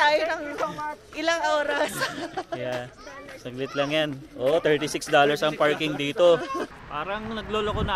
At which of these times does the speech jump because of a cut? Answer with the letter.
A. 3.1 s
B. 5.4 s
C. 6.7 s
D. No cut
C